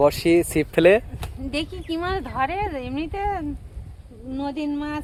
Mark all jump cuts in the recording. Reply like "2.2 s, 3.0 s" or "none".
none